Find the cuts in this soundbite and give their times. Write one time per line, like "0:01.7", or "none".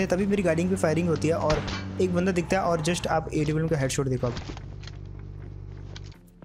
none